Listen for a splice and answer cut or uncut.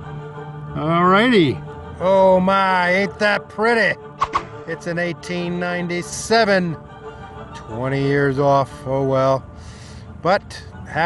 cut